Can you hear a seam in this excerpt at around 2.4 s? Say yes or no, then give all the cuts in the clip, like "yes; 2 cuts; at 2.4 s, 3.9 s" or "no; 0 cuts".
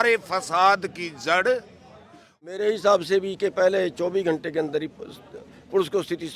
yes; 1 cut; at 2.4 s